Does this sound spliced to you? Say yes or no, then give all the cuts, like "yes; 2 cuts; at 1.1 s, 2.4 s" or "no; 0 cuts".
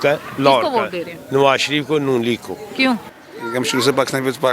yes; 1 cut; at 3.2 s